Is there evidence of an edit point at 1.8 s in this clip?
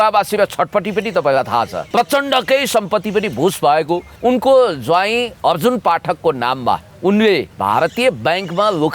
yes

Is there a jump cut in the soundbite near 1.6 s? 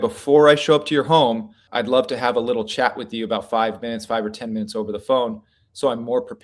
yes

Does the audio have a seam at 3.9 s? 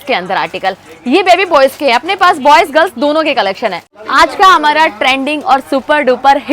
yes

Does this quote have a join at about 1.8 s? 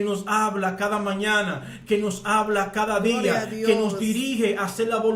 no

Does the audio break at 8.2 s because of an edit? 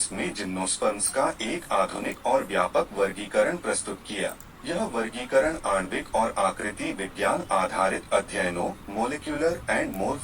no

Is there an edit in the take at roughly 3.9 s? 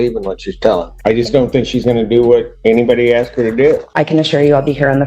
yes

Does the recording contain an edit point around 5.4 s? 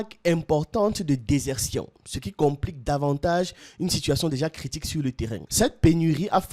yes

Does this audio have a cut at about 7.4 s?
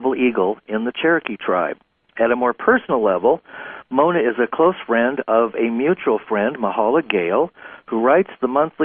yes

